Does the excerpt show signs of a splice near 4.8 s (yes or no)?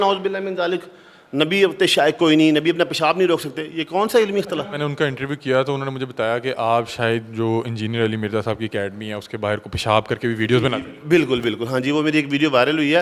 yes